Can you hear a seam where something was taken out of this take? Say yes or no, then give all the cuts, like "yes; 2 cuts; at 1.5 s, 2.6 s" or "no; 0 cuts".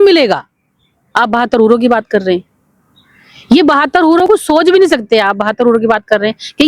no; 0 cuts